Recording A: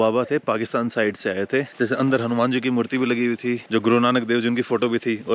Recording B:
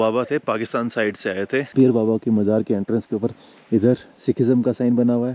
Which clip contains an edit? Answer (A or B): A